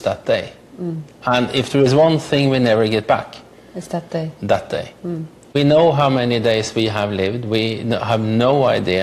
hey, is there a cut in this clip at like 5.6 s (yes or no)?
yes